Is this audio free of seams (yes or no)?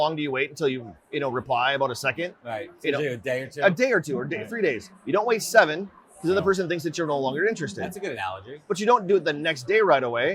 yes